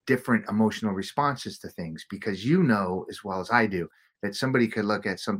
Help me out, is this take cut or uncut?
uncut